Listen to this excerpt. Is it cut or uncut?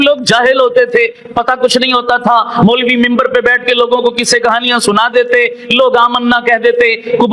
uncut